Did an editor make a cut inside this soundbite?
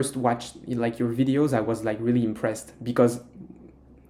no; 0 cuts

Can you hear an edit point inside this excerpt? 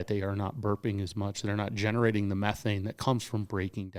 no; 0 cuts

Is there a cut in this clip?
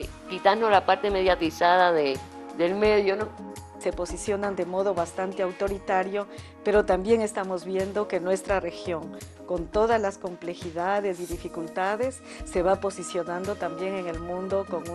yes; 1 cut; at 3.8 s

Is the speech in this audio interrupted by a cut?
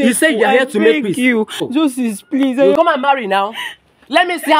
yes; 2 cuts; at 1.7 s, 2.8 s

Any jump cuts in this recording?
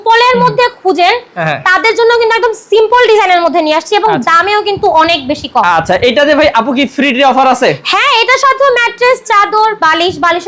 no; 0 cuts

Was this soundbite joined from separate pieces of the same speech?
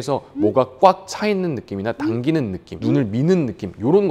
no; 0 cuts

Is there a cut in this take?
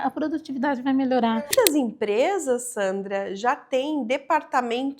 yes; 1 cut; at 1.5 s

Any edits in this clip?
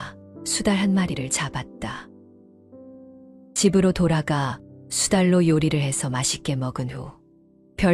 no; 0 cuts

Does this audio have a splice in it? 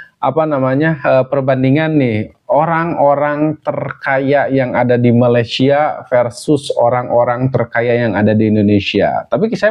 no; 0 cuts

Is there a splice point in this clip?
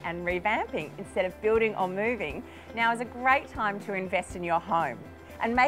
no; 0 cuts

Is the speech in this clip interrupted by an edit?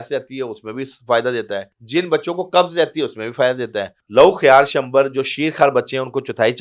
yes; 2 cuts; at 1.7 s, 4.0 s

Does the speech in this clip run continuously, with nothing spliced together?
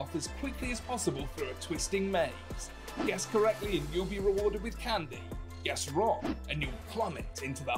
yes; 0 cuts

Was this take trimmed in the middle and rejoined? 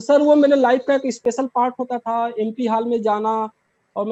no; 0 cuts

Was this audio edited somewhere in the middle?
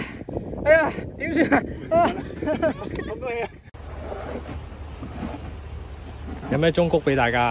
yes; 1 cut; at 4.0 s

